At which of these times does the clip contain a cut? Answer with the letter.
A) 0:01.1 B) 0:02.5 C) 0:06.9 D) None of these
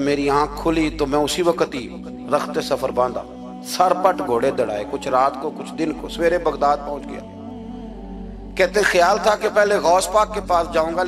D